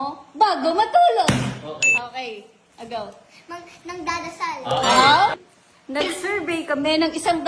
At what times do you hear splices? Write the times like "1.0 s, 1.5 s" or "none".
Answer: 5.3 s